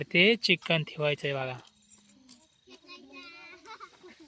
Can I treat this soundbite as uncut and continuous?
yes; 0 cuts

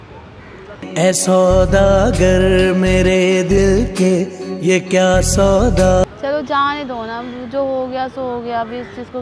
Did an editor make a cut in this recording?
no; 0 cuts

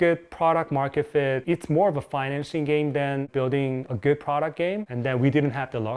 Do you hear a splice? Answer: yes; 2 cuts; at 1.4 s, 4.8 s

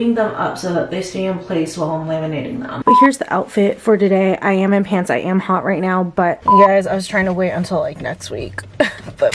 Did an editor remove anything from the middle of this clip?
yes; 2 cuts; at 2.8 s, 6.4 s

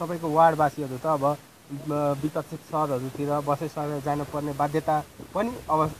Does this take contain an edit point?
no; 0 cuts

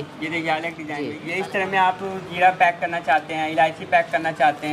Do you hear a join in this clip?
yes; 1 cut; at 1.2 s

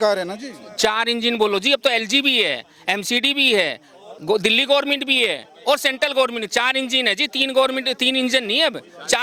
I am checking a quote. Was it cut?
no; 0 cuts

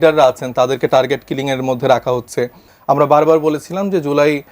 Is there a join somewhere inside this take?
yes; 1 cut; at 2.7 s

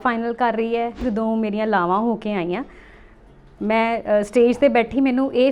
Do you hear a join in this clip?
yes; 1 cut; at 1.0 s

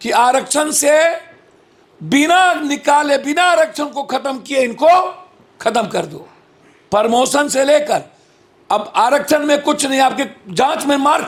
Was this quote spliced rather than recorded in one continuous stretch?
no; 0 cuts

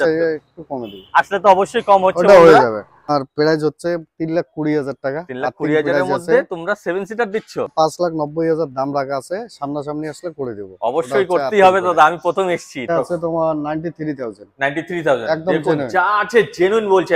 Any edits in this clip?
yes; 3 cuts; at 3.1 s, 7.7 s, 12.9 s

